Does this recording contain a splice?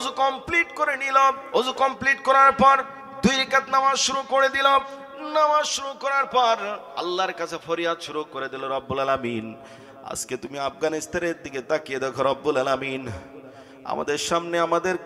yes; 2 cuts; at 1.4 s, 6.9 s

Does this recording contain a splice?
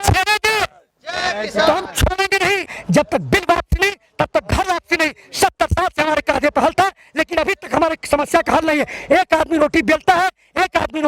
yes; 1 cut; at 2.8 s

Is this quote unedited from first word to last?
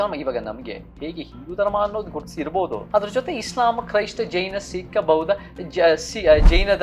no; 1 cut; at 2.8 s

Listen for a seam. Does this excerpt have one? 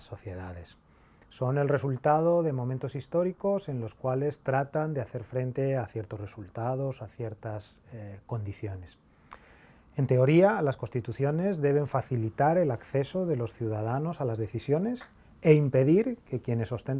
no; 0 cuts

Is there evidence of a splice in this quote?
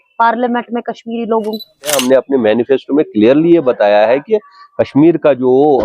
yes; 1 cut; at 2.0 s

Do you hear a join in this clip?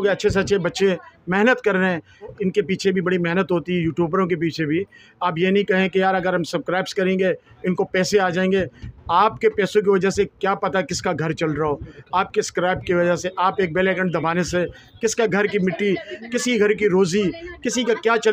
yes; 1 cut; at 2.3 s

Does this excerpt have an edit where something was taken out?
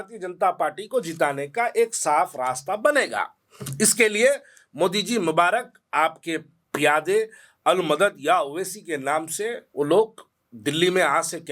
no; 0 cuts

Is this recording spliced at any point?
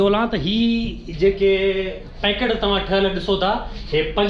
no; 0 cuts

